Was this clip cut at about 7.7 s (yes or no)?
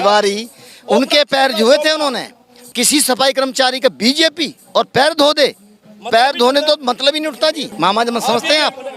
yes